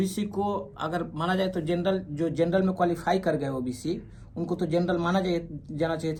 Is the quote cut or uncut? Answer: uncut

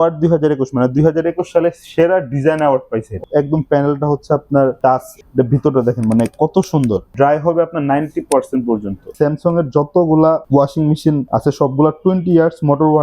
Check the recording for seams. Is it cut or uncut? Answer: cut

